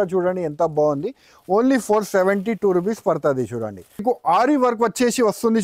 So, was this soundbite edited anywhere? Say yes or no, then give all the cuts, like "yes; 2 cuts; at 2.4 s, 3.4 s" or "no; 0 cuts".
yes; 1 cut; at 4.0 s